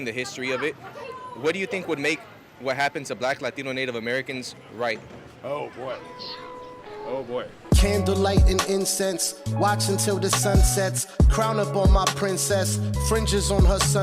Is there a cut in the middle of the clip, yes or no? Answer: yes